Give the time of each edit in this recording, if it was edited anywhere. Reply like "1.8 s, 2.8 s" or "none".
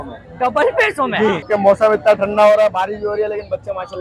1.4 s